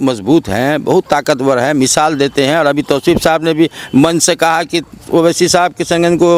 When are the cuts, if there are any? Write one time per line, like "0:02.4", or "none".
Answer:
none

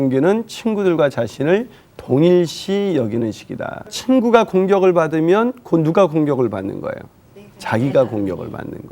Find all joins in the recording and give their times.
0:04.0

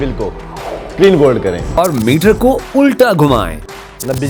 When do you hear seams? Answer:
none

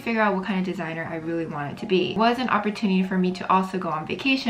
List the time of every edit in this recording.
0:02.2

